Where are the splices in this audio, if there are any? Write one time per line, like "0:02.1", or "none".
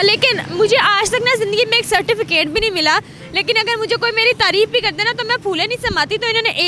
none